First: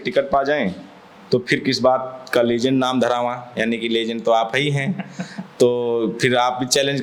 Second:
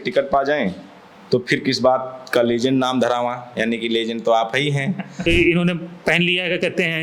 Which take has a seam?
second; 1 cut; at 5.2 s

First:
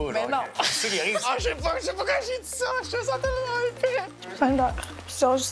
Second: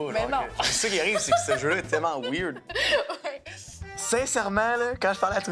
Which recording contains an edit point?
first; 2 cuts; at 1.2 s, 4.1 s

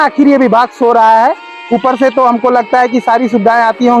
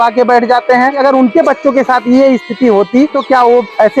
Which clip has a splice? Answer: second; 2 cuts; at 1.0 s, 3.2 s

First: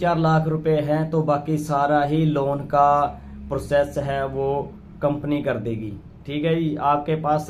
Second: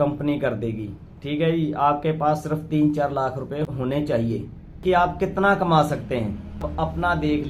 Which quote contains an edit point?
second; 3 cuts; at 3.7 s, 4.8 s, 6.7 s

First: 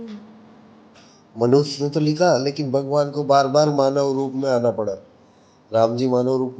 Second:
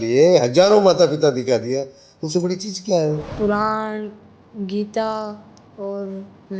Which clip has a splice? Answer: second; 1 cut; at 3.3 s

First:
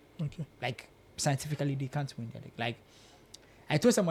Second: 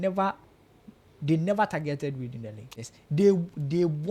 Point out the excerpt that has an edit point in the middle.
second; 1 cut; at 2.7 s

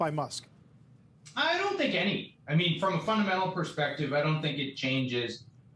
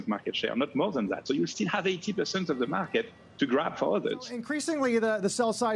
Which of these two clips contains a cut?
second; 1 cut; at 4.5 s

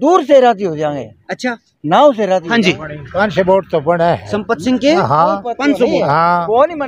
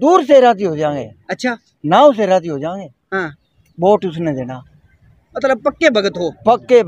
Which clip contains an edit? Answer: first; 1 cut; at 2.5 s

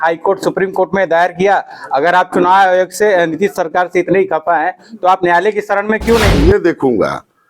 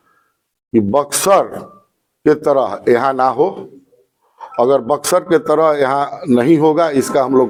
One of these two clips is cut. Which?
first; 1 cut; at 6.3 s

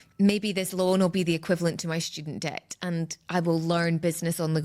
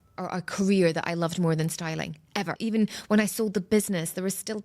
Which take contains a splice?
second; 1 cut; at 2.6 s

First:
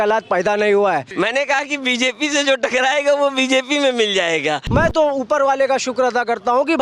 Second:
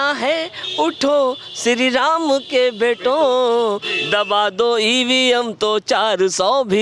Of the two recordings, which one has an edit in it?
first; 2 cuts; at 1.1 s, 4.6 s

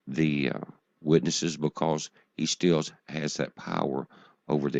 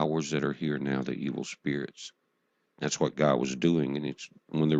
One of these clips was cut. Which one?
first; 1 cut; at 3.7 s

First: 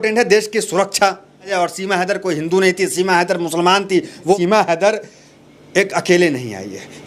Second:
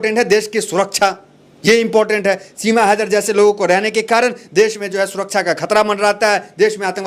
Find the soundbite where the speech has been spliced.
first; 2 cuts; at 1.5 s, 4.4 s

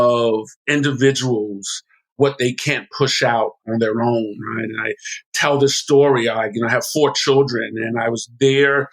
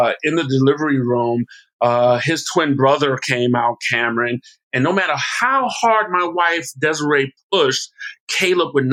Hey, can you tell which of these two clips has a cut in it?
first; 2 cuts; at 2.2 s, 3.6 s

